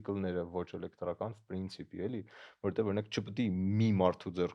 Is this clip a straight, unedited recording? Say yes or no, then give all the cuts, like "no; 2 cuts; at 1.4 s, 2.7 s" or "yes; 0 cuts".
yes; 0 cuts